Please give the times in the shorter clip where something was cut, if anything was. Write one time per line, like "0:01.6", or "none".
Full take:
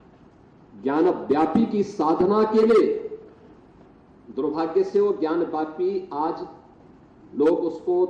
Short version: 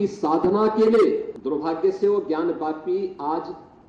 0:01.3